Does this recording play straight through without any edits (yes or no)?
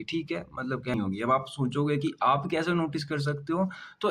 no